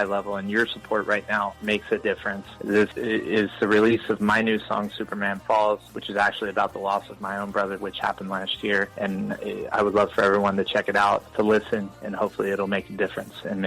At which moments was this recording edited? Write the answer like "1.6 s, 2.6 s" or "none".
none

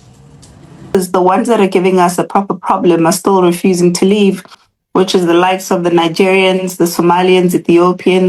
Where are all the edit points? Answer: 0.9 s

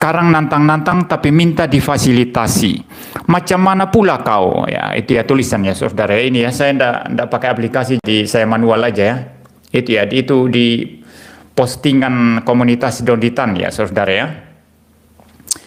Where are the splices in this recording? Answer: none

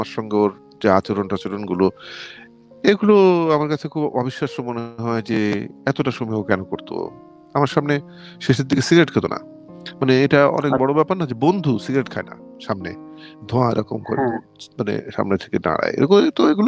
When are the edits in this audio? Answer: none

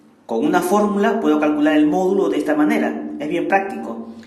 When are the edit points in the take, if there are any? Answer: none

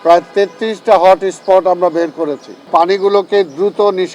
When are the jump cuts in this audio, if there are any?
2.7 s

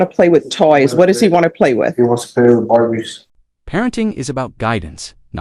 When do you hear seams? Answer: none

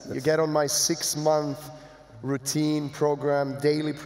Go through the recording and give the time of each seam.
none

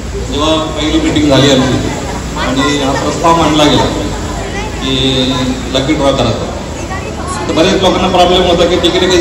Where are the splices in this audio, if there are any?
none

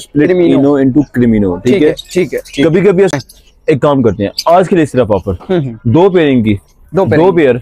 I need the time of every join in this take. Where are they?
3.1 s

